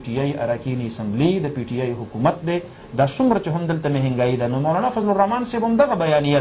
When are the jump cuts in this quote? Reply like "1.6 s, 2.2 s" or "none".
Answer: none